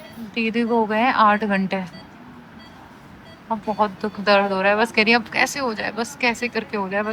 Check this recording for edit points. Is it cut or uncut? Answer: uncut